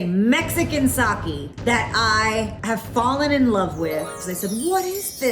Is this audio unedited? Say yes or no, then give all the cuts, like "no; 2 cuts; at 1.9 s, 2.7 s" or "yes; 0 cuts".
no; 3 cuts; at 1.5 s, 2.6 s, 4.2 s